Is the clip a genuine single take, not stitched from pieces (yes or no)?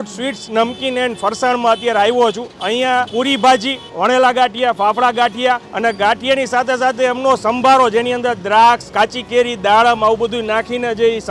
no